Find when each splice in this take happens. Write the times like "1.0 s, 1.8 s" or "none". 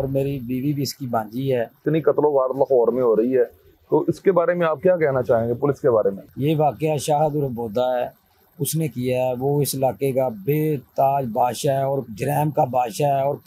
1.8 s, 6.3 s